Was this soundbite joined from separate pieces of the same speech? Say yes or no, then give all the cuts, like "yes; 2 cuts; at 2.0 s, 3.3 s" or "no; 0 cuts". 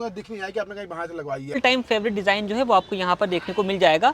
yes; 1 cut; at 1.6 s